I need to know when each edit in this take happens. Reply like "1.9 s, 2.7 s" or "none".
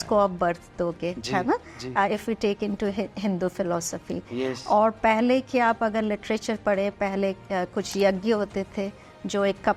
none